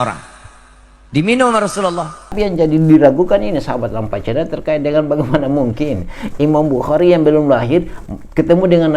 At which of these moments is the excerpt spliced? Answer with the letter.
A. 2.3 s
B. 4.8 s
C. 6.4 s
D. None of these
A